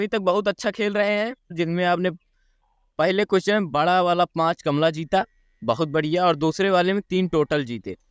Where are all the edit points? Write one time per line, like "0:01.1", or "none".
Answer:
0:01.6